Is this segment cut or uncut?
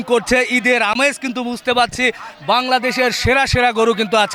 uncut